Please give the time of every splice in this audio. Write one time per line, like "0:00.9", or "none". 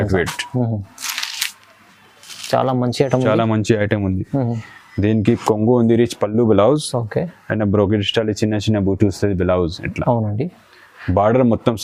none